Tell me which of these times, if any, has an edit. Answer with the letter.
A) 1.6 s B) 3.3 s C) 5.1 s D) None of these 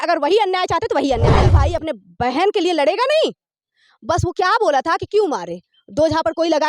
A